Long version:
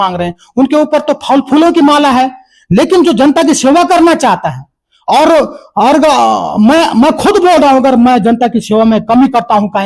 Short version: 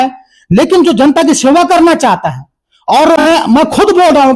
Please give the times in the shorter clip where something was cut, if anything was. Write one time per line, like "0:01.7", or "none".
0:03.2